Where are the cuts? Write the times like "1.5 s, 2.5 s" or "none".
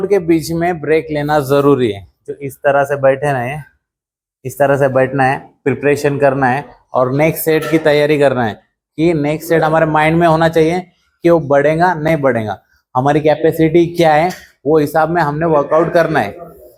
none